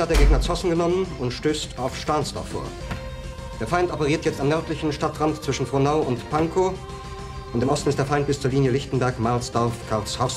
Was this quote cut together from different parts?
no; 0 cuts

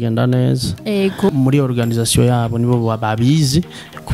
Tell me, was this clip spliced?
yes; 1 cut; at 1.3 s

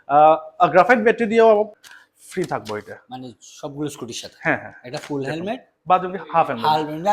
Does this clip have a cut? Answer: yes; 1 cut; at 1.8 s

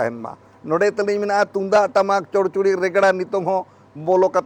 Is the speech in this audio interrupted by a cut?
no; 0 cuts

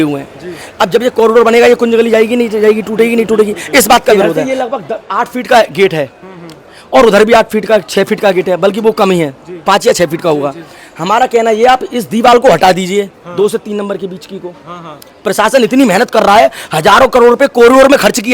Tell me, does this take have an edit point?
yes; 1 cut; at 4.3 s

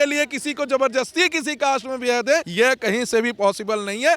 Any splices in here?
yes; 1 cut; at 2.5 s

